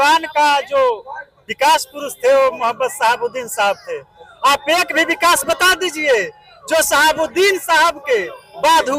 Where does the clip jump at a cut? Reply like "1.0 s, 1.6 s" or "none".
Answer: none